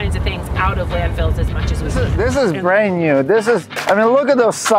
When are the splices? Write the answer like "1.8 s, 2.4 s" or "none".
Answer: 2.1 s